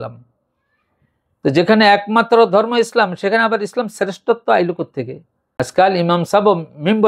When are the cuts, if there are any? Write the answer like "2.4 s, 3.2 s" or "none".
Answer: 5.4 s